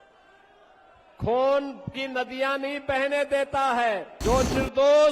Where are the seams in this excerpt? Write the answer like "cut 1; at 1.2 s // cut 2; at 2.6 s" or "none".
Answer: cut 1; at 4.1 s